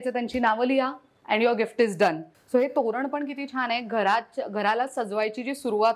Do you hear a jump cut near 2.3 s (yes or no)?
yes